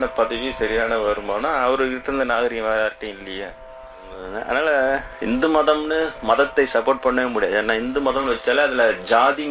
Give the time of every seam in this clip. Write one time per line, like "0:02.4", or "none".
0:04.3

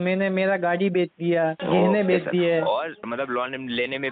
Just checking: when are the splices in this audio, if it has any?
0:01.6
0:03.0

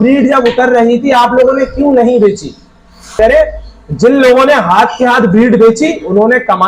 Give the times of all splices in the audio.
0:03.2

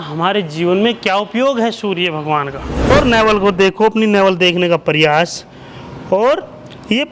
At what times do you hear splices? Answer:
0:02.9

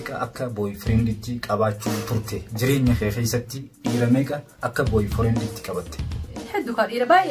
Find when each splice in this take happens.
0:03.8
0:06.3

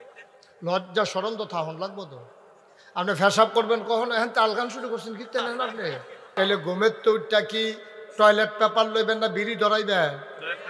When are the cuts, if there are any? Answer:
0:06.3

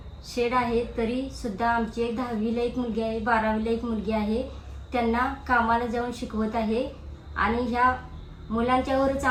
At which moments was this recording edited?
none

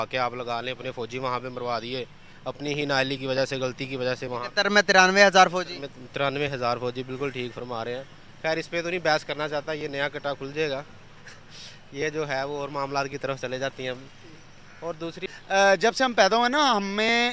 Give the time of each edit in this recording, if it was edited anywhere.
0:15.1

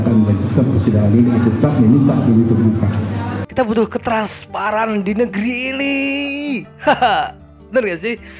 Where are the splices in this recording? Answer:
0:03.5

